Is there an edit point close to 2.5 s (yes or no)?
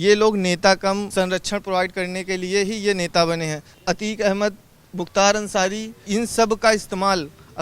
no